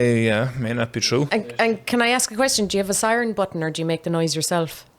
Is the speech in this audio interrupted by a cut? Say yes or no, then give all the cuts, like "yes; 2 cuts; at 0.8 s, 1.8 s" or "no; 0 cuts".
yes; 1 cut; at 1.3 s